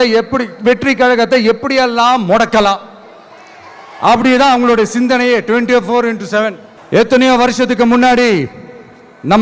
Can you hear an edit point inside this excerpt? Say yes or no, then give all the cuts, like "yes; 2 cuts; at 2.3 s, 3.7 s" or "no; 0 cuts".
no; 0 cuts